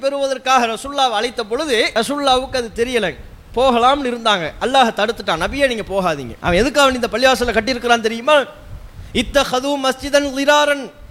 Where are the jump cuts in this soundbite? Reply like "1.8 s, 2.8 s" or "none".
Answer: 1.9 s, 6.3 s